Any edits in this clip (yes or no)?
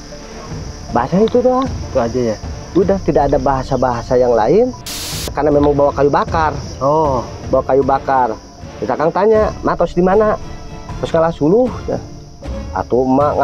yes